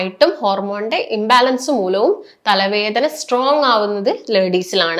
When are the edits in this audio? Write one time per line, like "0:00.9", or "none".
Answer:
none